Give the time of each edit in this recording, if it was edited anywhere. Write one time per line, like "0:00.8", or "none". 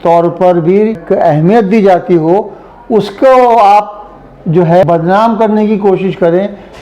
0:01.0
0:04.8